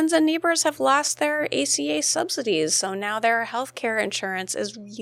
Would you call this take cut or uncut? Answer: uncut